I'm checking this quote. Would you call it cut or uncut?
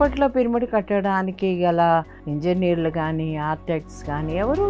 cut